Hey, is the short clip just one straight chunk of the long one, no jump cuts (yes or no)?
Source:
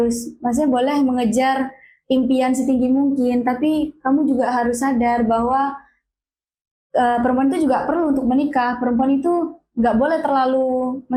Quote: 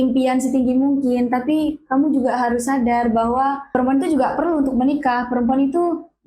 no